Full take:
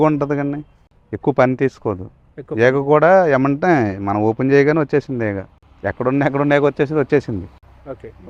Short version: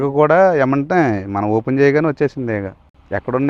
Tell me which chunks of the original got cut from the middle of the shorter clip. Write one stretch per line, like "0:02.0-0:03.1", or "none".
none